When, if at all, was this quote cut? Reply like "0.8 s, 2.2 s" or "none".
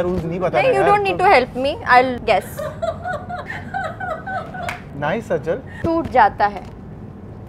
2.2 s, 3.5 s, 4.9 s, 5.7 s